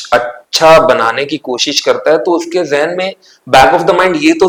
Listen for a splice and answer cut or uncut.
uncut